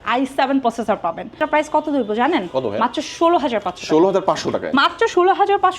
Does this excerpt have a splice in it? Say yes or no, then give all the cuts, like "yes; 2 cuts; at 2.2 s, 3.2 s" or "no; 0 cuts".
yes; 1 cut; at 1.4 s